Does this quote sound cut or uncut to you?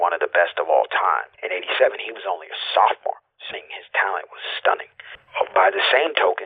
cut